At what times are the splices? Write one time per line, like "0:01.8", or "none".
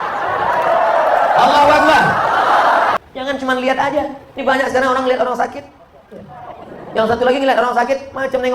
0:03.0